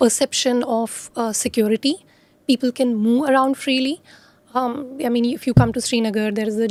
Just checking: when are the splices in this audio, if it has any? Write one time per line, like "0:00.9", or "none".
none